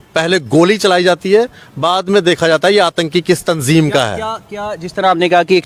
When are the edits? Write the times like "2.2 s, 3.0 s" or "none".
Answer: none